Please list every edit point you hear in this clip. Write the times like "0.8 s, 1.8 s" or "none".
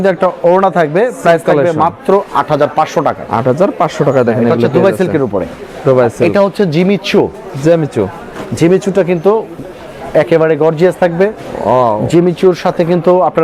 none